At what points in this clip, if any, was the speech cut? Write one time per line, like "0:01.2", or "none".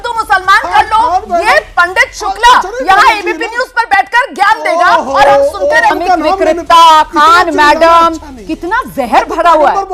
0:05.9